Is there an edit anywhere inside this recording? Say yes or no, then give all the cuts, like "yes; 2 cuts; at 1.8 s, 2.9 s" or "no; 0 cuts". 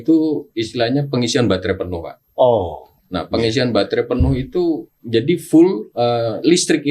yes; 2 cuts; at 4.9 s, 5.9 s